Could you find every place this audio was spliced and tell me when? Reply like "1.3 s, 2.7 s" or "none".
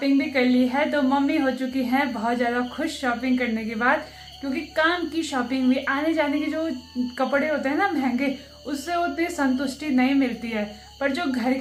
none

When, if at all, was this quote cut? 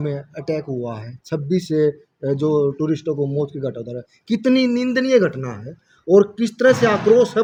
none

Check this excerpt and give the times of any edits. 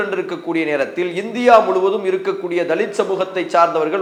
none

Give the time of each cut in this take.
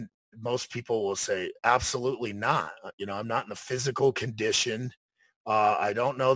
none

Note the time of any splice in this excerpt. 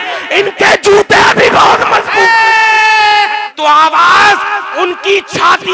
3.5 s

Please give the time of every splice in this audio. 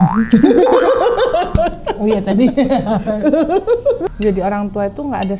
4.1 s

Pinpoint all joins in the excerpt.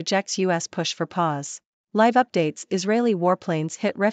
1.9 s

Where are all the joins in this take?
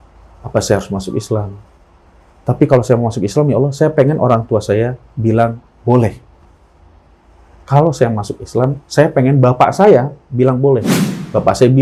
10.9 s

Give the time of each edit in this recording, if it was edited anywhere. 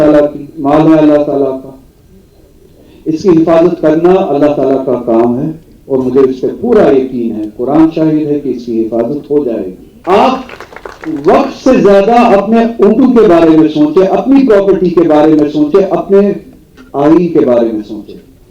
9.9 s

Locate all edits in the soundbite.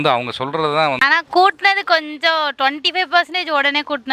1.0 s

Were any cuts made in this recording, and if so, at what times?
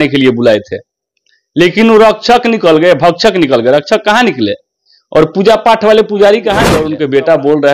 6.8 s

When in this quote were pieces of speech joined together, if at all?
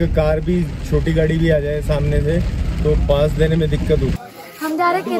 4.2 s

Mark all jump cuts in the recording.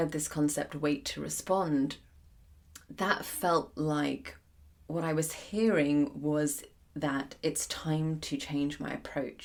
none

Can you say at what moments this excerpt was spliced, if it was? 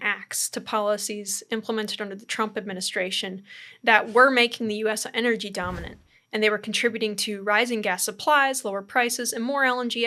none

